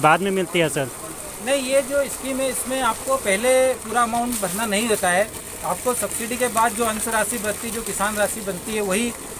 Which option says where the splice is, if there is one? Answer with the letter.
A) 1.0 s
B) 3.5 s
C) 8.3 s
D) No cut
D